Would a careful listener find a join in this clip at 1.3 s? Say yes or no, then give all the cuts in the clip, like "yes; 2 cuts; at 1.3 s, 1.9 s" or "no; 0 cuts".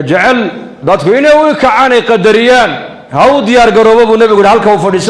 no; 0 cuts